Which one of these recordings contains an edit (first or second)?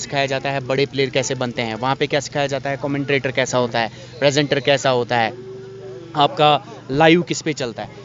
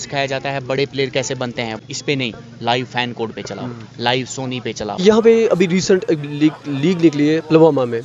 second